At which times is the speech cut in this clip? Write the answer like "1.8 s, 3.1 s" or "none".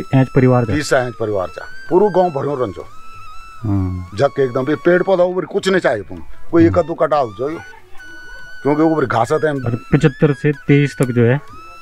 none